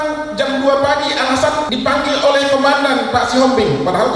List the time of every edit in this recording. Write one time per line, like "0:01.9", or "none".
0:01.7